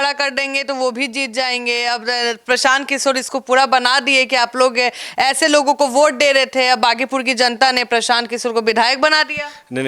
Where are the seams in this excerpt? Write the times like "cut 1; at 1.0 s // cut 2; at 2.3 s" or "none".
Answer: none

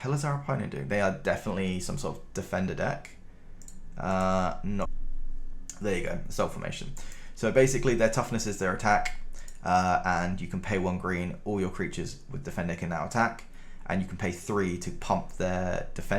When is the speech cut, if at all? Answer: cut 1; at 5.0 s

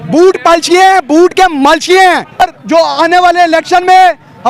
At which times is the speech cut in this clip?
cut 1; at 2.4 s

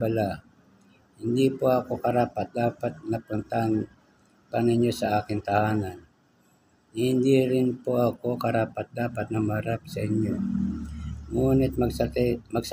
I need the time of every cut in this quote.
none

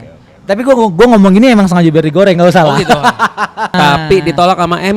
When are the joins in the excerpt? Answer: cut 1; at 3.7 s

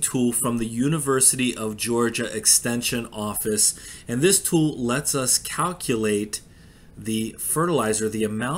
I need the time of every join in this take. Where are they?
none

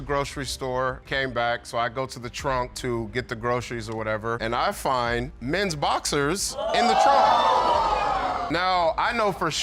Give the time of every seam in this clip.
none

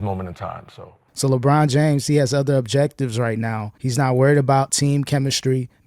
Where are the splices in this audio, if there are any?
cut 1; at 1.1 s

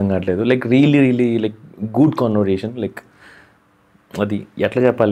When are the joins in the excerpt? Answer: none

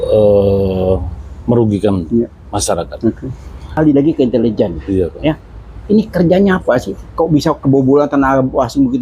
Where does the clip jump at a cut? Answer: cut 1; at 3.8 s

